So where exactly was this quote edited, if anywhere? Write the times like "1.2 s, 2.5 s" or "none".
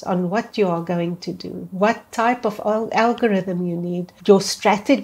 4.1 s